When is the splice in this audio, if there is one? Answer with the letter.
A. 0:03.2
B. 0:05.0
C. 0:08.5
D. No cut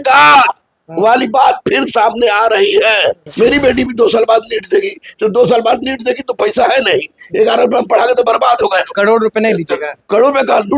A